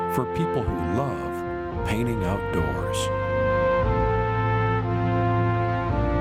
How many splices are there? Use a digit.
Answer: 0